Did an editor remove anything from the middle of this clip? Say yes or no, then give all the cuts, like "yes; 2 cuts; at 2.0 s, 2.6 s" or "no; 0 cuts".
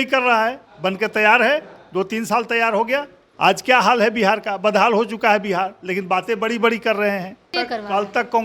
yes; 2 cuts; at 3.2 s, 7.5 s